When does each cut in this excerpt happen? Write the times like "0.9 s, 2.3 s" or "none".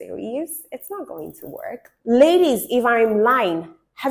1.9 s